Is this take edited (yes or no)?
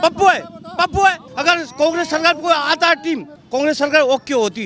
yes